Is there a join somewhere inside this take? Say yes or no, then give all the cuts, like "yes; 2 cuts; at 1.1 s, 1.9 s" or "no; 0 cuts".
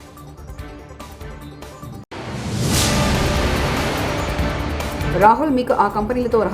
yes; 1 cut; at 5.0 s